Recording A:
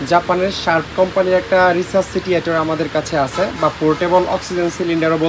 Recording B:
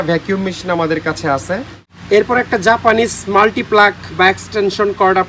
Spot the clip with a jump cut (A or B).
B